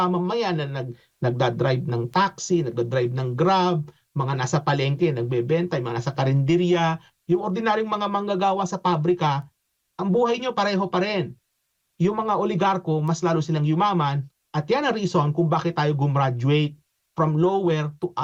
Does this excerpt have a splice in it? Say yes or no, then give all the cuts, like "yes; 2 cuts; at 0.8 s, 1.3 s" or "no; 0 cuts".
no; 0 cuts